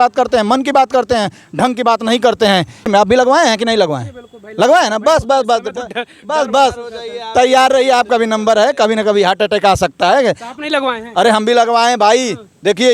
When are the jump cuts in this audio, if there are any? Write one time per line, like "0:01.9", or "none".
0:02.9